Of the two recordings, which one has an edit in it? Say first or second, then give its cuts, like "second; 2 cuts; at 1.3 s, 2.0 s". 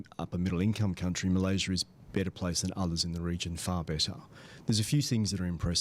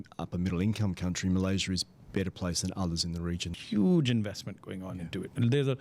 second; 1 cut; at 3.5 s